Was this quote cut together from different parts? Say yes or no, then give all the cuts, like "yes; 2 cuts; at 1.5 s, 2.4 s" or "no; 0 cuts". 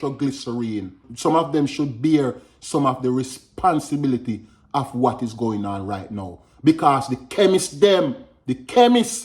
yes; 1 cut; at 1.0 s